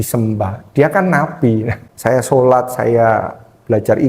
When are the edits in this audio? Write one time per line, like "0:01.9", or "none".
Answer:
0:01.8